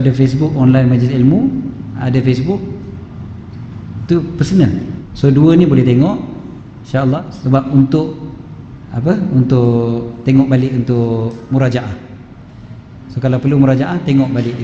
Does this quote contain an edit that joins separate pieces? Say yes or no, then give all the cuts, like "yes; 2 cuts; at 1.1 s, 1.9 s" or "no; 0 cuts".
yes; 2 cuts; at 5.0 s, 7.2 s